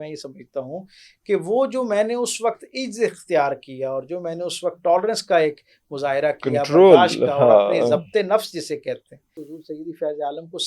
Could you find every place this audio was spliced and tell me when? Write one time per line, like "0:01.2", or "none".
0:09.4

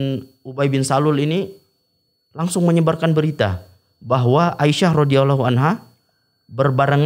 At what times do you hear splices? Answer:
none

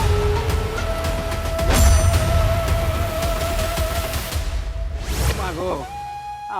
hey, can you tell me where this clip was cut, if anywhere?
0:05.2

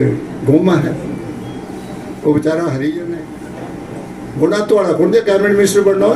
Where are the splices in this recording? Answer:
0:03.1

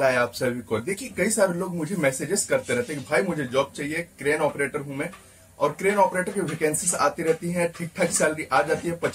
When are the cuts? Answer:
none

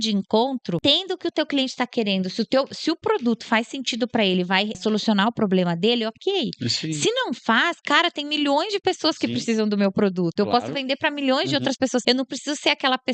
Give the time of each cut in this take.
0:00.8
0:04.8
0:12.0

